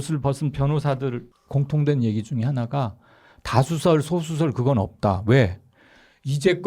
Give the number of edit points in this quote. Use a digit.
1